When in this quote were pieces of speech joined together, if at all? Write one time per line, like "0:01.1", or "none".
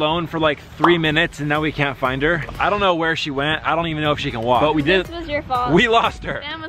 none